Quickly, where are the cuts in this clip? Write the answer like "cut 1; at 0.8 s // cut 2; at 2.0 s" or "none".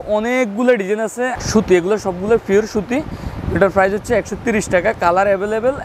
cut 1; at 1.3 s

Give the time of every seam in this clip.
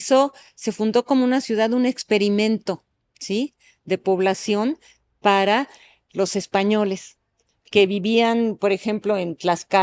none

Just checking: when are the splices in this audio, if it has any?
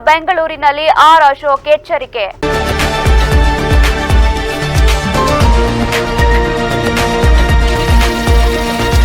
cut 1; at 2.3 s

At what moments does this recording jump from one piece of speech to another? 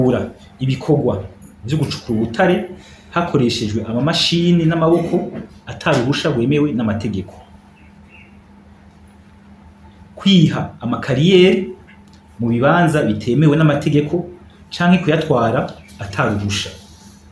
none

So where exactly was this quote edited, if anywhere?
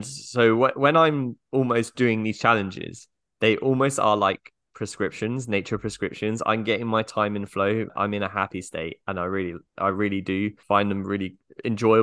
cut 1; at 7.9 s // cut 2; at 10.6 s

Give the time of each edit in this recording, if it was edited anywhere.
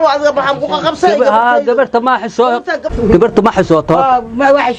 cut 1; at 2.8 s

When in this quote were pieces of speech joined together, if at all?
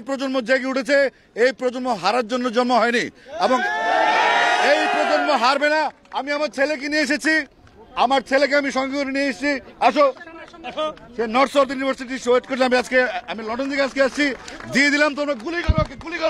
none

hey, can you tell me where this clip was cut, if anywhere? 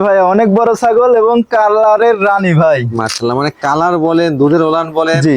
none

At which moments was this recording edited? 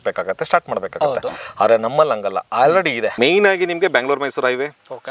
cut 1; at 3.1 s

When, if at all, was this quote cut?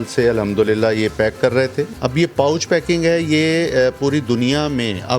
cut 1; at 1.9 s

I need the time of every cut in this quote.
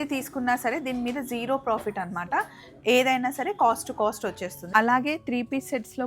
cut 1; at 4.6 s

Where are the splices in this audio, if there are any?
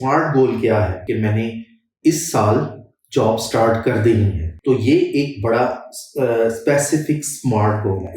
cut 1; at 1.0 s // cut 2; at 4.4 s

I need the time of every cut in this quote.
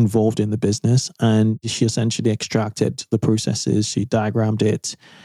cut 1; at 1.7 s

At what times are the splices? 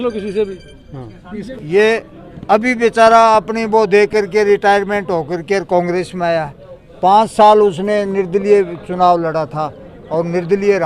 cut 1; at 1.3 s

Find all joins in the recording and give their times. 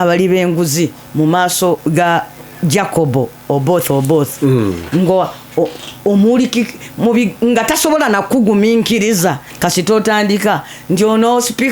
cut 1; at 1.8 s // cut 2; at 9.5 s

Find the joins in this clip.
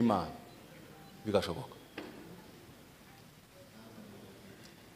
cut 1; at 3.2 s

